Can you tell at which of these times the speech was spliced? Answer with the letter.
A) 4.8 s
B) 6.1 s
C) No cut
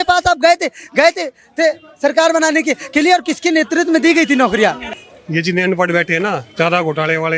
A